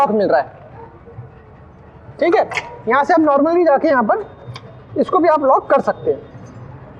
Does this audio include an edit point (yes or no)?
no